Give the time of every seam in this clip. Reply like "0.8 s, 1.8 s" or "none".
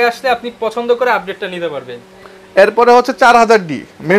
none